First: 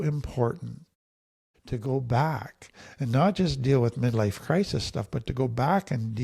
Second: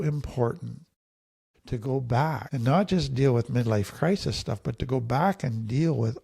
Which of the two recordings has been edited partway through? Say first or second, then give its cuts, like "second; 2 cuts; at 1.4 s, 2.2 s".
second; 1 cut; at 2.5 s